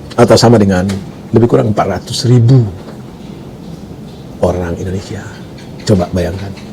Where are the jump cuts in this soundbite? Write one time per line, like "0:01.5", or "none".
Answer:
none